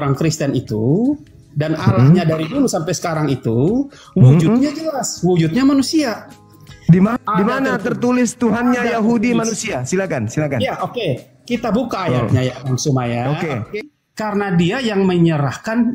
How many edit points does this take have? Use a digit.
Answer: 1